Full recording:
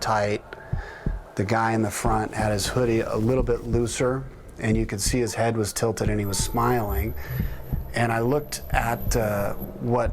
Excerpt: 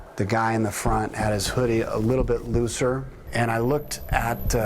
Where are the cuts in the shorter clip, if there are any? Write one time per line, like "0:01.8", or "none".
0:03.2